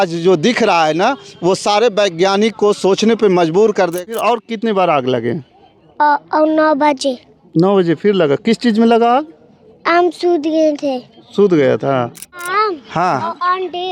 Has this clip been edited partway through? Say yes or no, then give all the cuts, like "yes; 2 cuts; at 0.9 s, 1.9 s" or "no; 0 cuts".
yes; 2 cuts; at 4.0 s, 12.4 s